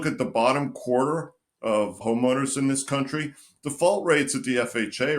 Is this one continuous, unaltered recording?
no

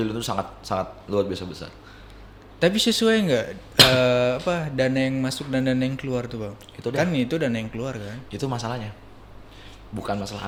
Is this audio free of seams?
yes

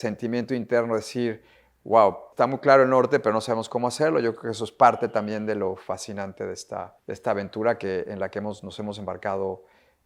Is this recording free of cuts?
no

